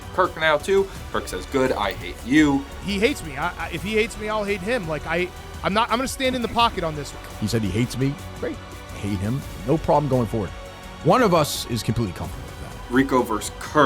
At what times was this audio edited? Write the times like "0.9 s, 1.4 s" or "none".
12.7 s